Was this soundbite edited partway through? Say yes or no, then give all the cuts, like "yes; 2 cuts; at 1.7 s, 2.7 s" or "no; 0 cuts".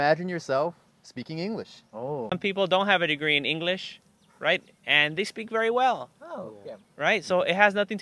yes; 1 cut; at 2.3 s